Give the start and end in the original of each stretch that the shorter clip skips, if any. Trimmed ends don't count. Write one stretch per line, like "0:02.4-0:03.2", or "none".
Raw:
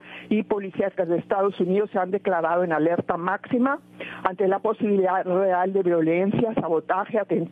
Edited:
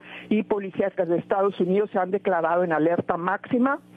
none